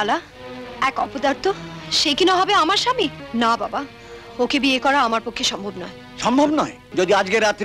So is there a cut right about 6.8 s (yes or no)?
yes